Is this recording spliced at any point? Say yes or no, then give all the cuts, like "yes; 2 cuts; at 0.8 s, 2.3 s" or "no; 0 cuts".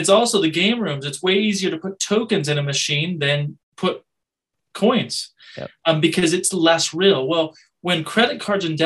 yes; 1 cut; at 3.7 s